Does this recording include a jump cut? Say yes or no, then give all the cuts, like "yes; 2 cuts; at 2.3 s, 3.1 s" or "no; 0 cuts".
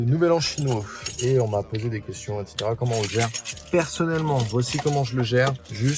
no; 0 cuts